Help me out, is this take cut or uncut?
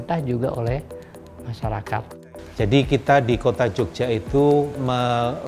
cut